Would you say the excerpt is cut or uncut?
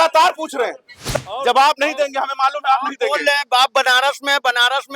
cut